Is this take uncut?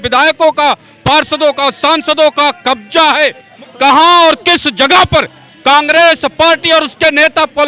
no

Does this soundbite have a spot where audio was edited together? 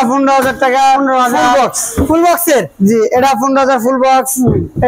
no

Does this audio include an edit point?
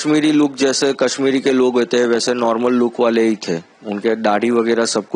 no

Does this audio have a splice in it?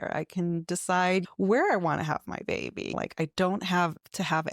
yes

